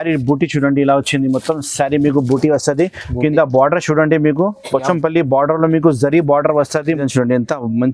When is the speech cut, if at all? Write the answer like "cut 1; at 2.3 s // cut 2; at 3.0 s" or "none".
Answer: cut 1; at 7.0 s